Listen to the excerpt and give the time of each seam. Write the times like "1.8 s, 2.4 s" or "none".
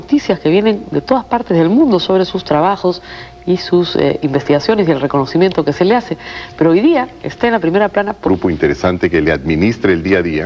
none